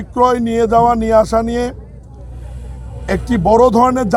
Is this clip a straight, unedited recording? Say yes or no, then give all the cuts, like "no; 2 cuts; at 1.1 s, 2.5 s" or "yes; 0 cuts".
yes; 0 cuts